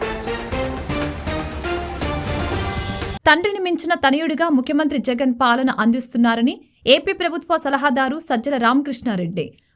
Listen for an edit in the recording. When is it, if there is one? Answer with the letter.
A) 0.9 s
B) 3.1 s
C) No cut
B